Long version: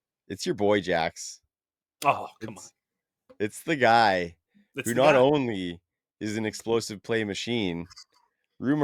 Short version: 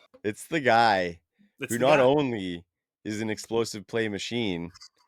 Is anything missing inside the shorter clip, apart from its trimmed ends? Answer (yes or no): no